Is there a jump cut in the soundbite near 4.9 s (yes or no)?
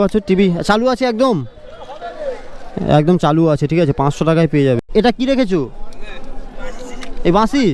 yes